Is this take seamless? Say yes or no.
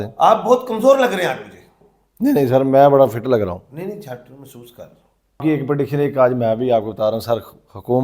no